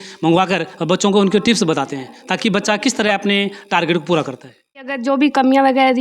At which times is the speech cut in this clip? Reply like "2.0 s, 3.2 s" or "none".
4.9 s